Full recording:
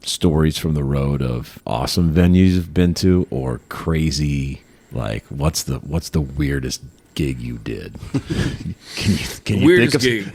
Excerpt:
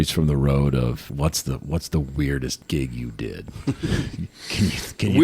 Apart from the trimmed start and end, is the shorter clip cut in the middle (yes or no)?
yes